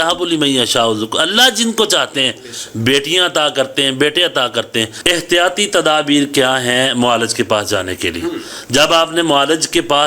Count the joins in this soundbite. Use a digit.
1